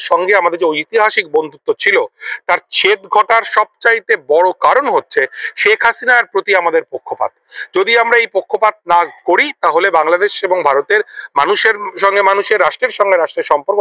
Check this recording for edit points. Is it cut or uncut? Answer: uncut